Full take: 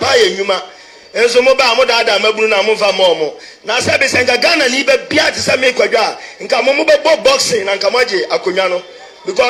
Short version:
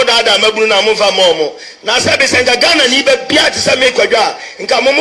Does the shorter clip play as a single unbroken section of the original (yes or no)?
yes